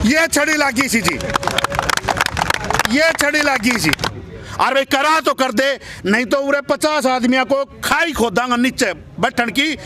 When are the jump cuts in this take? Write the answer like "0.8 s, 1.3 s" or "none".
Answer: 4.1 s